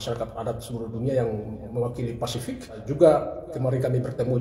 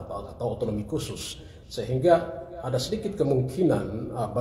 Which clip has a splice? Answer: first; 1 cut; at 2.8 s

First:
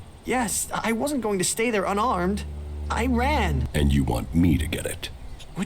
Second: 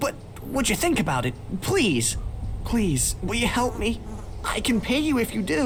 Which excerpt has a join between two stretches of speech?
first; 1 cut; at 3.6 s

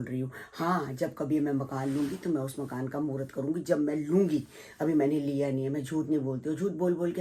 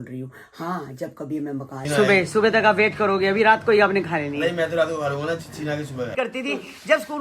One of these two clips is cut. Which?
second; 2 cuts; at 1.8 s, 6.1 s

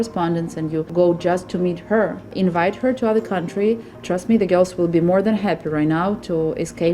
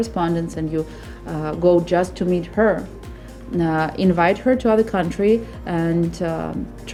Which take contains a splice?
first; 3 cuts; at 0.9 s, 2.3 s, 3.9 s

